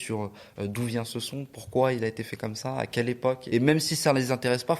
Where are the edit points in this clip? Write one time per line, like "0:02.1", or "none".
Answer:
0:03.4